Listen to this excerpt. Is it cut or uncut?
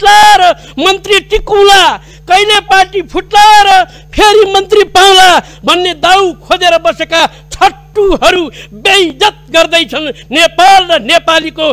uncut